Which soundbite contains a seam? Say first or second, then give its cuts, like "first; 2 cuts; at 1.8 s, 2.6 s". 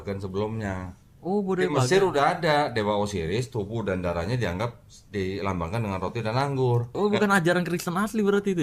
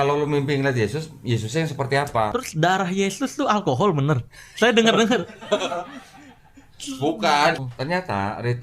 second; 2 cuts; at 2.3 s, 7.6 s